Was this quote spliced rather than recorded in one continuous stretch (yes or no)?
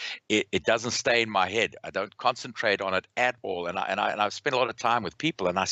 no